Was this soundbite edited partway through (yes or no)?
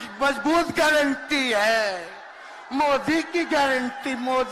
no